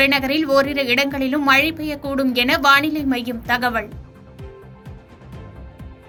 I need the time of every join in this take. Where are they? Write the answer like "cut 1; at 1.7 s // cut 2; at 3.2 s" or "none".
none